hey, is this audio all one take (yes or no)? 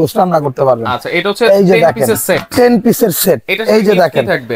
yes